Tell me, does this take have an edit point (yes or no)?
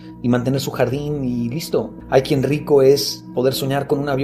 yes